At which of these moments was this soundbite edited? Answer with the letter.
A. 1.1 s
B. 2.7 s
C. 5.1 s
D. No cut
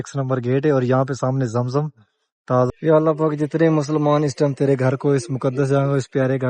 B